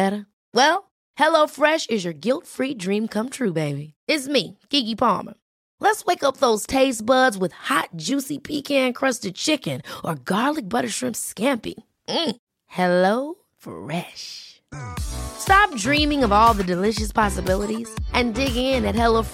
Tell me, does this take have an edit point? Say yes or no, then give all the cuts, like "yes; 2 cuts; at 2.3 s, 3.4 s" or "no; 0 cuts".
no; 0 cuts